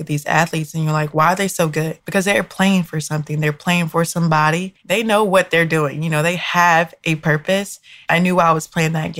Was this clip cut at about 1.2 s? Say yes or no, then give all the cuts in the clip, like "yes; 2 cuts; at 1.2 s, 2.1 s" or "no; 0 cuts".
no; 2 cuts; at 4.7 s, 7.9 s